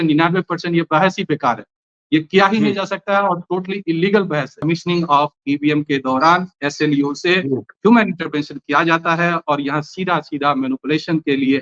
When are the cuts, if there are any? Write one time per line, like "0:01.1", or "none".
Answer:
0:04.6